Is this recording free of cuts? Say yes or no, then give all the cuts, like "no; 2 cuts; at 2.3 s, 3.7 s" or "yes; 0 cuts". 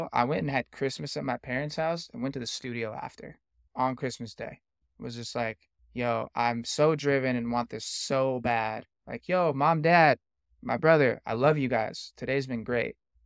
no; 3 cuts; at 3.6 s, 4.8 s, 5.7 s